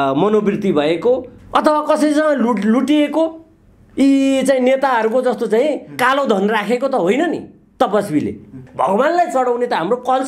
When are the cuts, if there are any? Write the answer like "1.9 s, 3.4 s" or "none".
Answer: 1.4 s, 8.7 s